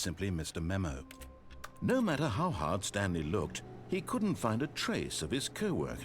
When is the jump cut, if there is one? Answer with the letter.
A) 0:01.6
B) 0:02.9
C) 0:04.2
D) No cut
A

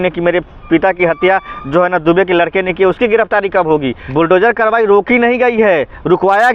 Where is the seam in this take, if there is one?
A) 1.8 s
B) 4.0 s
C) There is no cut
B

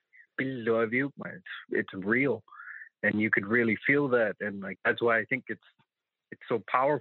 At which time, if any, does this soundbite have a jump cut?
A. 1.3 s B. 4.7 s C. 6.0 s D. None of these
B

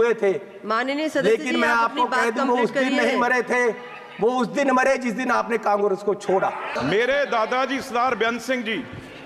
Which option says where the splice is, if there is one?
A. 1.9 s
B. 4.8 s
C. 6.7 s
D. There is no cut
C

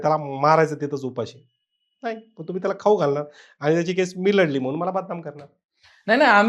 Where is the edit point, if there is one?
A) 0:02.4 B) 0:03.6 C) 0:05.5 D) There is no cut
D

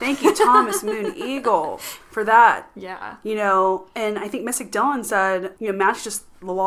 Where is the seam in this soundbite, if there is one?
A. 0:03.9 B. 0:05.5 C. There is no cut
B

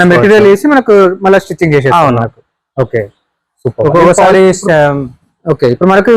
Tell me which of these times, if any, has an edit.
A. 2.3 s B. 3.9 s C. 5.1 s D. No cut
D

